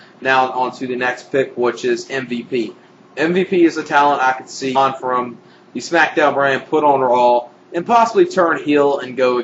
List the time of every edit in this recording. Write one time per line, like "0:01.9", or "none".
none